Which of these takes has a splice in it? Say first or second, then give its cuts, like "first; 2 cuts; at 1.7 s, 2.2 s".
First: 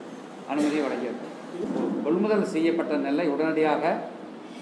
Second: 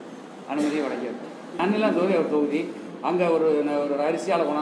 second; 1 cut; at 1.4 s